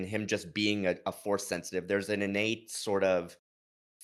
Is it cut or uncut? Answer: uncut